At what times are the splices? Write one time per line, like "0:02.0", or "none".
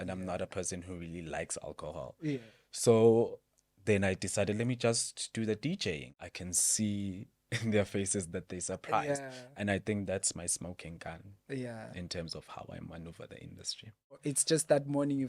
0:06.1
0:14.2